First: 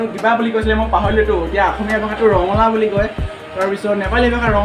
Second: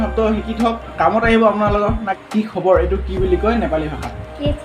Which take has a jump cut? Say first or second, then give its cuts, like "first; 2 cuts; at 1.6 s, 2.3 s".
second; 2 cuts; at 0.9 s, 2.1 s